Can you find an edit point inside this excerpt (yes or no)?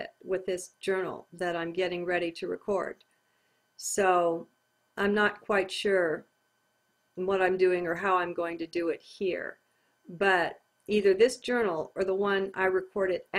yes